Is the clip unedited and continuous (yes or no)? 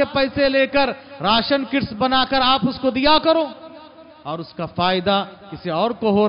yes